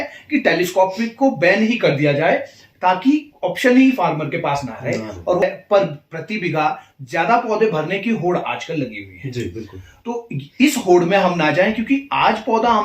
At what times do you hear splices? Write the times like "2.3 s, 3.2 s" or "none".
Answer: 5.4 s